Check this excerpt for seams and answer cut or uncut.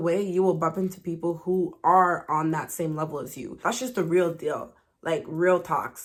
uncut